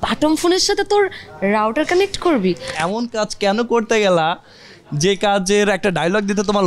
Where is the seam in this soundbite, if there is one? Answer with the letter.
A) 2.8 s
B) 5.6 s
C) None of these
A